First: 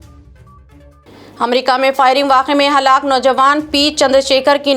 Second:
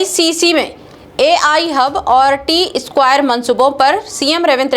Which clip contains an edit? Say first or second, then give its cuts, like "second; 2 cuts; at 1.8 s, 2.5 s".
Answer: first; 1 cut; at 1.0 s